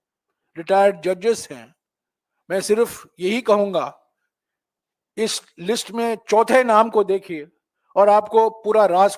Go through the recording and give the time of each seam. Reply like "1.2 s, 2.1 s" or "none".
none